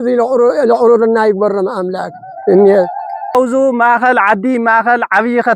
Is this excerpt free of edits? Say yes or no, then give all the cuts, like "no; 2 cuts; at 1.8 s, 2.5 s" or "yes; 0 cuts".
no; 1 cut; at 3.3 s